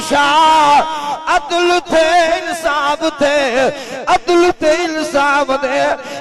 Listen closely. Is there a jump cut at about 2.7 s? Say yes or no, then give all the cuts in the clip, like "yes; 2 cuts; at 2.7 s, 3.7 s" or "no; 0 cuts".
no; 0 cuts